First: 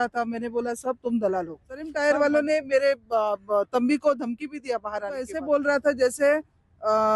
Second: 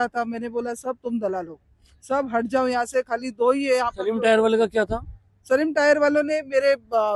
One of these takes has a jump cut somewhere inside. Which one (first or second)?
first